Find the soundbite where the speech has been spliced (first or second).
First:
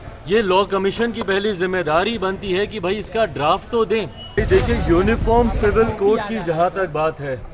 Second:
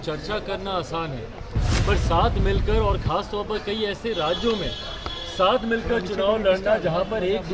first